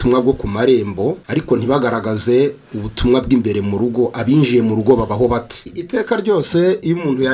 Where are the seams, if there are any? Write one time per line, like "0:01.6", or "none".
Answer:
0:01.2